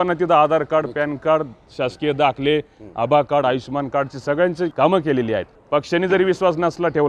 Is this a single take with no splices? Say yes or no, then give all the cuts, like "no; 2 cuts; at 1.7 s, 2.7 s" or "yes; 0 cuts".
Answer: no; 2 cuts; at 4.7 s, 5.5 s